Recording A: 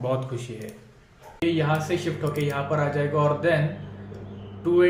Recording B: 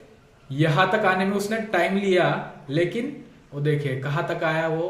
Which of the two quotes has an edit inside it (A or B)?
A